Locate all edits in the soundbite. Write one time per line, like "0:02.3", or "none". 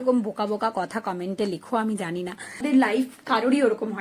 0:02.6

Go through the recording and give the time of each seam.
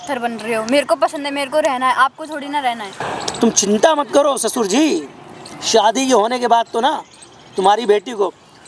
0:03.1

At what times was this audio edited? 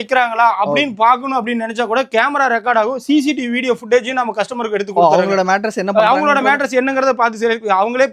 none

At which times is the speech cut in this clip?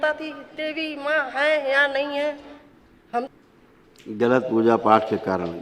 0:03.3

